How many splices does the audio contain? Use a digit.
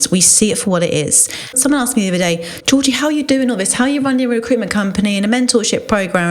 1